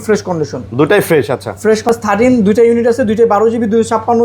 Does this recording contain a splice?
yes; 1 cut; at 1.9 s

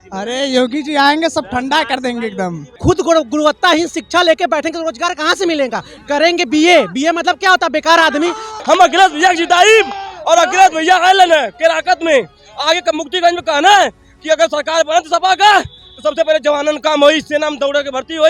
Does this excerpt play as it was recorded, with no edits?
no; 2 cuts; at 2.6 s, 8.5 s

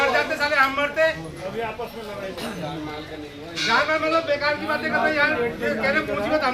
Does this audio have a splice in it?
no; 0 cuts

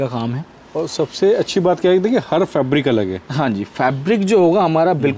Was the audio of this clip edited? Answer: no; 0 cuts

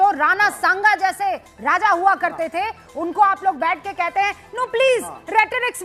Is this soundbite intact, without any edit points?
yes; 0 cuts

